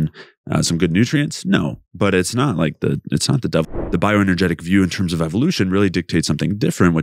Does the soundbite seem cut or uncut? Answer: cut